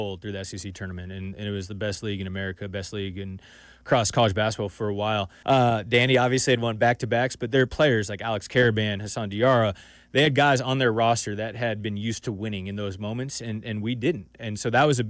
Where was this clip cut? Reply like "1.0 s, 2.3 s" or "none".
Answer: 5.3 s

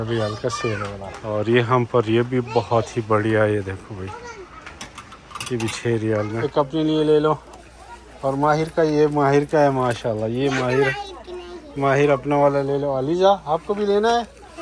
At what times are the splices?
1.1 s, 6.3 s

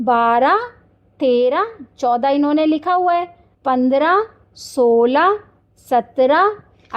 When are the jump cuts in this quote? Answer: none

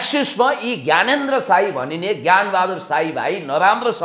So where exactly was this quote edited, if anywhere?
none

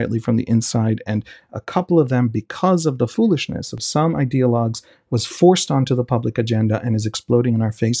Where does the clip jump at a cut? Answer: 3.5 s

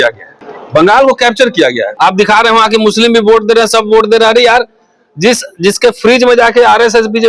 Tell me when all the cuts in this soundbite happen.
1.9 s

